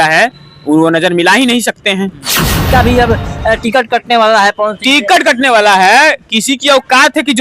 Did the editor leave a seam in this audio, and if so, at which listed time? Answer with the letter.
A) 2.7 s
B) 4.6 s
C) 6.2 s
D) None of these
A